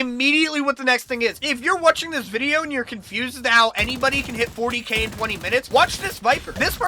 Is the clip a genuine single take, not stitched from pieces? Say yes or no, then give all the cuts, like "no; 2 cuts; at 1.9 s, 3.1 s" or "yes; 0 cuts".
no; 1 cut; at 1.5 s